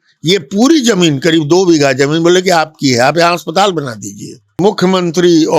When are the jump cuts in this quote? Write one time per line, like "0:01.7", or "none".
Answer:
0:04.6